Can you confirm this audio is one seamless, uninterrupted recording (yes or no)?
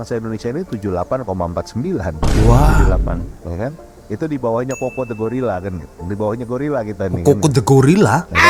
yes